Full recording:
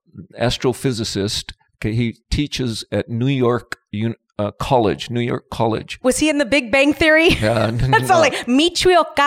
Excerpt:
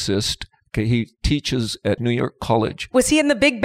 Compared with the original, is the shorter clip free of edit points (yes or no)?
no